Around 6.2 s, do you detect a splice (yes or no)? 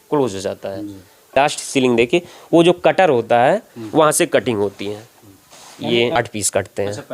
yes